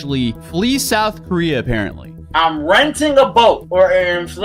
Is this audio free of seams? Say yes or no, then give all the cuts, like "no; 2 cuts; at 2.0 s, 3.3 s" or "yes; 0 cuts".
yes; 0 cuts